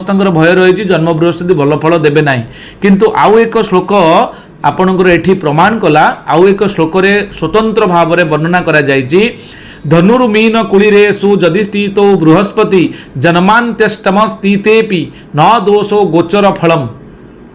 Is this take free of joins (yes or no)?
yes